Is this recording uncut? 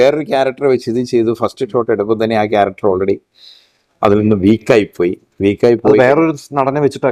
yes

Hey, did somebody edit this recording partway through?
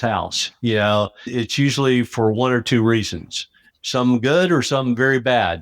yes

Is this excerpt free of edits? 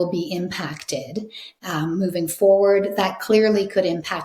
no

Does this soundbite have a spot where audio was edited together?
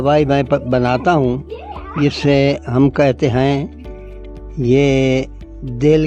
no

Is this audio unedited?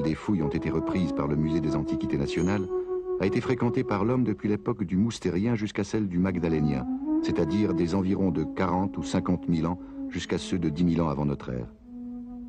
yes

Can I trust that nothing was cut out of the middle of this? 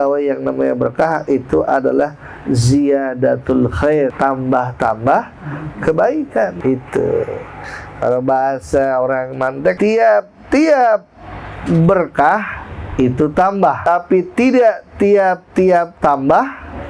no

